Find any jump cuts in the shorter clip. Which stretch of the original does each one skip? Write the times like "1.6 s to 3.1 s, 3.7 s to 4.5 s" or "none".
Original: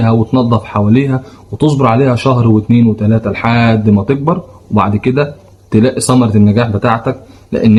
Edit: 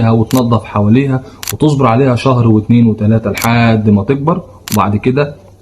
none